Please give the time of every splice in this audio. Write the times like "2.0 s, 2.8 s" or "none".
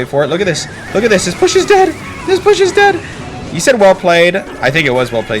4.5 s